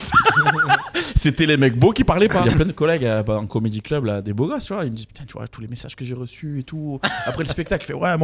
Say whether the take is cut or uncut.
cut